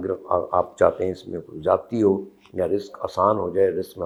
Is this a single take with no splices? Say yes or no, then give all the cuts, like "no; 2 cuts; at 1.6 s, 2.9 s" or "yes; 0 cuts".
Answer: yes; 0 cuts